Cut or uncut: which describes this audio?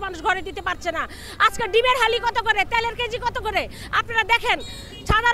uncut